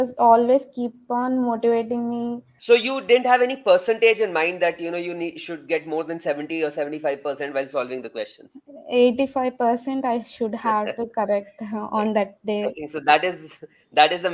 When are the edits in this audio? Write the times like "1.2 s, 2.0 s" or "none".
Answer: 2.5 s

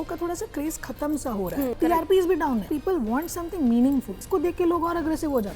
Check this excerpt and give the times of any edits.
1.7 s, 2.7 s, 4.2 s

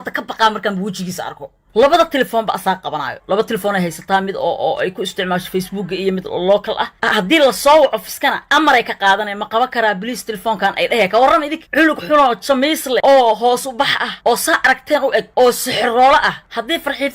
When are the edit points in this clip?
1.6 s, 7.0 s

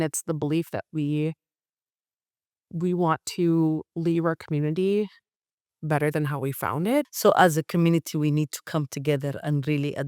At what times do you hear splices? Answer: 7.1 s

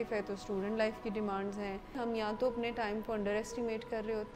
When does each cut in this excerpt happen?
2.0 s

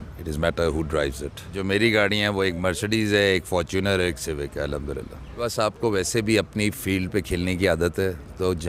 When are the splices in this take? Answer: 1.6 s, 5.4 s

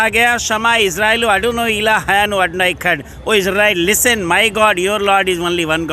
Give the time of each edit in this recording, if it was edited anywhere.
none

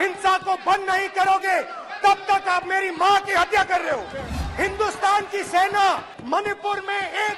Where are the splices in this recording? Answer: 4.3 s, 6.1 s

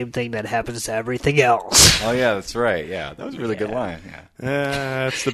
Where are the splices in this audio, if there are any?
none

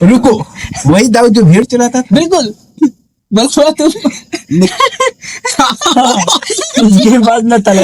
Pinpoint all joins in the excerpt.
3.1 s

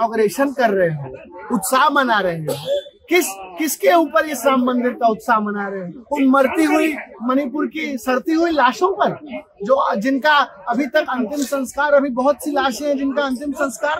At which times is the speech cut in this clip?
none

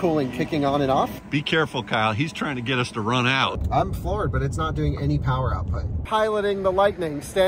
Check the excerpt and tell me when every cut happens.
1.2 s, 3.5 s, 6.0 s

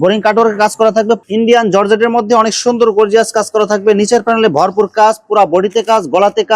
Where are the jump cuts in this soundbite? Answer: 1.2 s

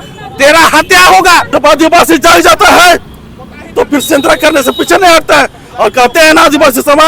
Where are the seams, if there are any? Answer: 1.5 s

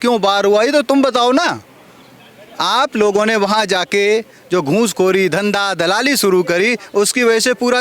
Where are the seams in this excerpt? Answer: none

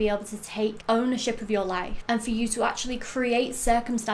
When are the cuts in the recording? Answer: 0.8 s, 1.9 s

